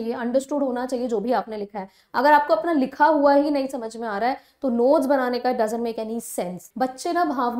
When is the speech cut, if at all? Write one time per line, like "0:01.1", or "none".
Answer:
0:06.6